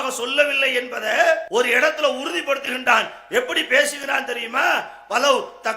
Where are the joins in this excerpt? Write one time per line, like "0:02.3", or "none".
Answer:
0:01.4